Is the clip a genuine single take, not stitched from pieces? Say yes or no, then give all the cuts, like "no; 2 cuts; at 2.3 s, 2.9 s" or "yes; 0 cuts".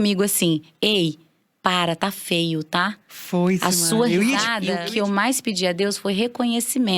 no; 1 cut; at 4.6 s